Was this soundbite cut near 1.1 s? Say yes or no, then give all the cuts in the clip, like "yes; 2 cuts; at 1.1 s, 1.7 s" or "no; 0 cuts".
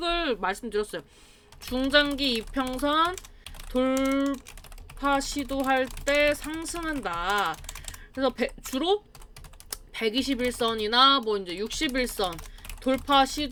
no; 0 cuts